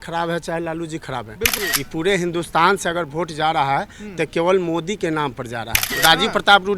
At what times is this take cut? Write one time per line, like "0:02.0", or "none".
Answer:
0:01.5
0:05.9